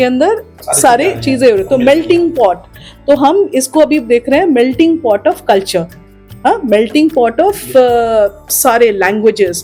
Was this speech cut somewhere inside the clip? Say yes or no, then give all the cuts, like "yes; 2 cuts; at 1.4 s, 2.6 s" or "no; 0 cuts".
no; 0 cuts